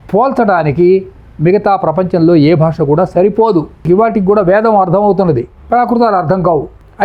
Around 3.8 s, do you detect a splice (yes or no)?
yes